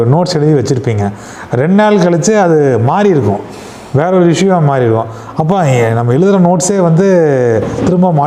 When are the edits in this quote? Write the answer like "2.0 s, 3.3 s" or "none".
none